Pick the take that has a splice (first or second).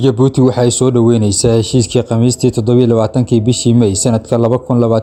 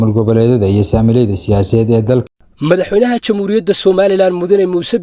second